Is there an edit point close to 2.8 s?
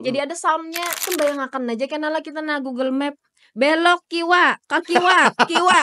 no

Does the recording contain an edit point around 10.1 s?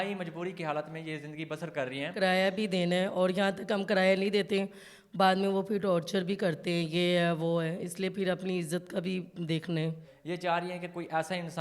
yes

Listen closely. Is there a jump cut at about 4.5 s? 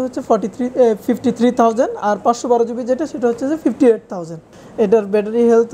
yes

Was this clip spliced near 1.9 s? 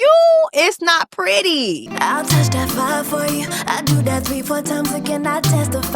yes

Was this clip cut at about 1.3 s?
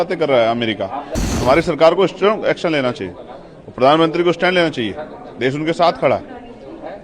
yes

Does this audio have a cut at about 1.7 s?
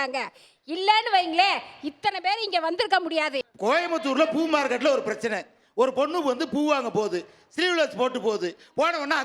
no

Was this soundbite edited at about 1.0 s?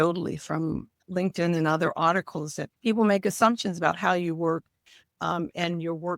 yes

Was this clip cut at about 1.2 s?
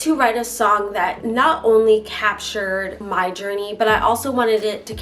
yes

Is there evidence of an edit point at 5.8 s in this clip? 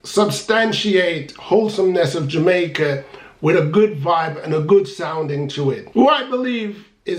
yes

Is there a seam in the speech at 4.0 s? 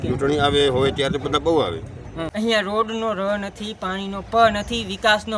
no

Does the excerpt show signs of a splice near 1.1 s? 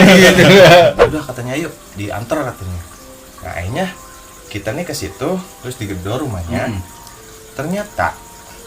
yes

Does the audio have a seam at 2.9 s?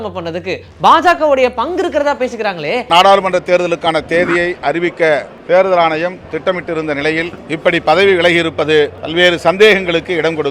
yes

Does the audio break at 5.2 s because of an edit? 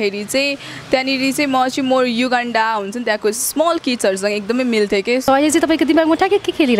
yes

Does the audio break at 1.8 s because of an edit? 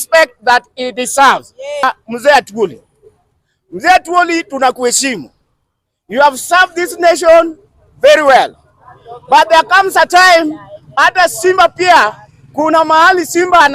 yes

